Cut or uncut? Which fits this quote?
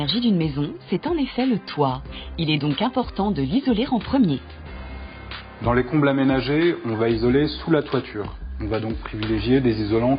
cut